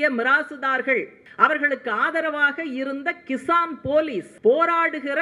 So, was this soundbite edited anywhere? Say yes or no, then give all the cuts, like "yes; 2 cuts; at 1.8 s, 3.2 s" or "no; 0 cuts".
yes; 2 cuts; at 1.2 s, 4.3 s